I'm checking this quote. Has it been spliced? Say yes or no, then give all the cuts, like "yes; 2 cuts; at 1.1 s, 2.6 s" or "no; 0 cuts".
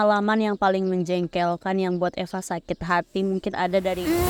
no; 0 cuts